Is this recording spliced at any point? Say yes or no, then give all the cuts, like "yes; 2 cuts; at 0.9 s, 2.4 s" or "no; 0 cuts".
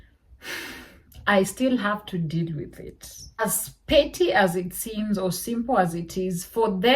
yes; 1 cut; at 3.4 s